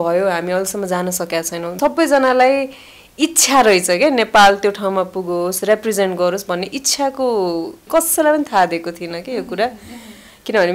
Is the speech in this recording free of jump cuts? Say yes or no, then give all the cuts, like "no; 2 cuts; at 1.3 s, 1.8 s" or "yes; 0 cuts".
no; 2 cuts; at 1.8 s, 7.8 s